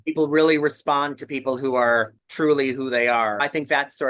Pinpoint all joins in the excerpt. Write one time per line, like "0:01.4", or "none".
0:02.2
0:03.4